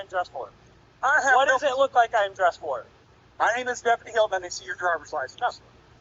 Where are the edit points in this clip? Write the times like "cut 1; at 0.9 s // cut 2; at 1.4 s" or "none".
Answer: none